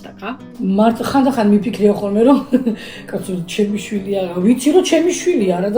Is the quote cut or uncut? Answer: uncut